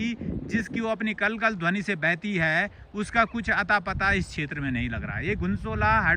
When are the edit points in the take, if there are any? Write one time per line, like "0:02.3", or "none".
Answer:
none